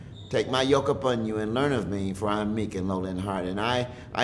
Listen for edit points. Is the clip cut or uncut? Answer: uncut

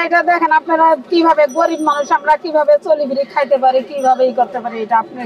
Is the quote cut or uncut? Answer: uncut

